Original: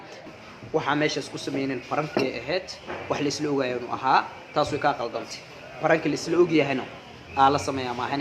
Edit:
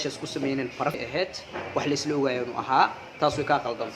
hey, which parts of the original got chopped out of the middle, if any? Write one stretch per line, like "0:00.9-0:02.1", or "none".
0:02.1-0:02.3